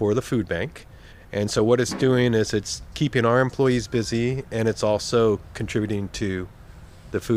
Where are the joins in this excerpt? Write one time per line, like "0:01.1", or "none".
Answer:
none